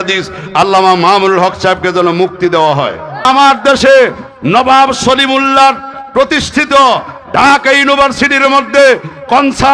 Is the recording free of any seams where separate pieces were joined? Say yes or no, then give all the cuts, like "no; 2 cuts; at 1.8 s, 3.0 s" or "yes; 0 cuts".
no; 1 cut; at 3.3 s